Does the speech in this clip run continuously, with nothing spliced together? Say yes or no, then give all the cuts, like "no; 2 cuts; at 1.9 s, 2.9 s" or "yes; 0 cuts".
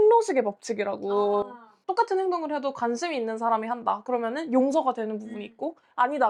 yes; 0 cuts